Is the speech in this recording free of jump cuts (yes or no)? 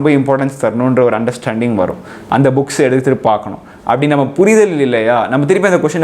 no